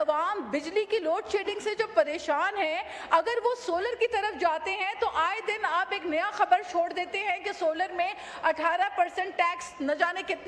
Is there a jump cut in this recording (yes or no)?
no